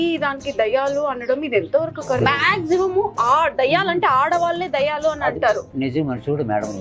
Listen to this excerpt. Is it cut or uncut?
cut